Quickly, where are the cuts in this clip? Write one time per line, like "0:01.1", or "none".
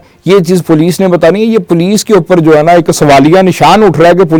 none